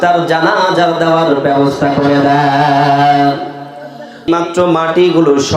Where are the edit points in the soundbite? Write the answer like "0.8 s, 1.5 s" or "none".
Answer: 4.3 s